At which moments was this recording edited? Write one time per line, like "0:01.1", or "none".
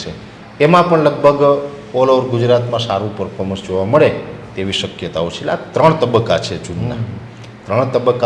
none